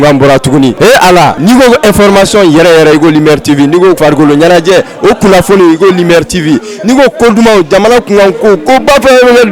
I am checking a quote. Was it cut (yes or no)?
yes